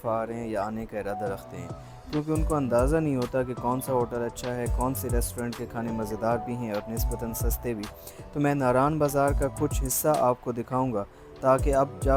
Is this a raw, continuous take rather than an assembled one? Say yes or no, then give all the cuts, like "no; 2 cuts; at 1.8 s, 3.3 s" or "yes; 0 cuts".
yes; 0 cuts